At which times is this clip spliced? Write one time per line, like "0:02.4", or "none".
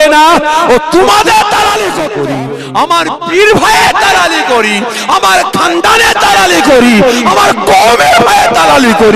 0:02.1